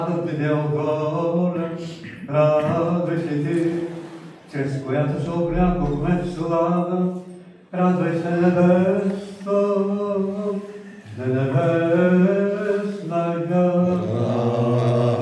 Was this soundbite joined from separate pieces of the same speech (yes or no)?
yes